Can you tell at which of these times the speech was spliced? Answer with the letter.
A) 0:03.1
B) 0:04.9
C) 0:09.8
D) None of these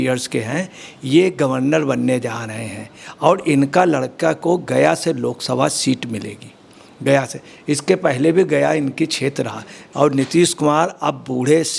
C